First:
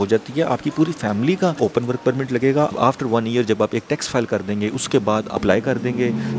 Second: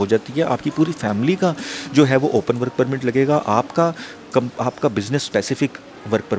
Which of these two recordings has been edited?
first; 3 cuts; at 1.6 s, 2.7 s, 5.4 s

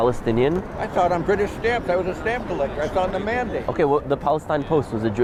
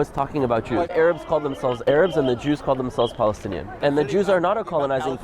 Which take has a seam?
second; 2 cuts; at 0.9 s, 3.8 s

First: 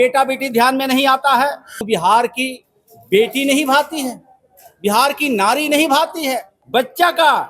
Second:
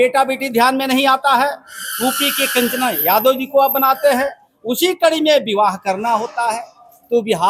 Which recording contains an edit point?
first; 2 cuts; at 1.9 s, 6.5 s

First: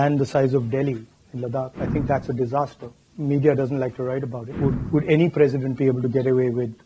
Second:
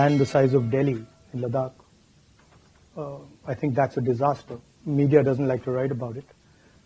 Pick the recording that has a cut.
first; 2 cuts; at 1.8 s, 4.4 s

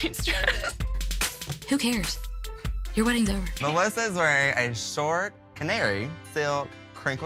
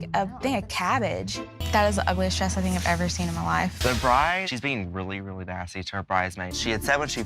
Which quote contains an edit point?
second; 2 cuts; at 1.5 s, 3.8 s

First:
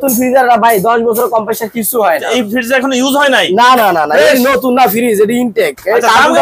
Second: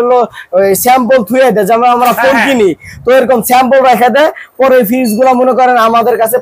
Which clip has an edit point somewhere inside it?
first; 1 cut; at 2.3 s

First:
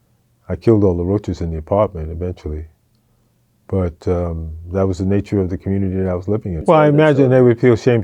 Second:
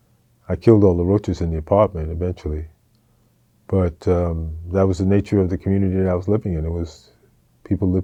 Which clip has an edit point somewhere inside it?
first; 1 cut; at 6.6 s

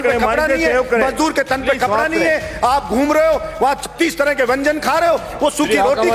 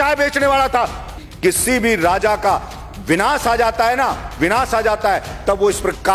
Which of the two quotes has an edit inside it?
second; 1 cut; at 1.2 s

